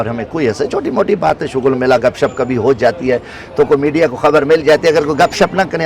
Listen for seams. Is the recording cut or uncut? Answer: uncut